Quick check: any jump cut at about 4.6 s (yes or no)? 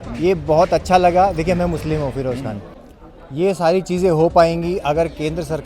no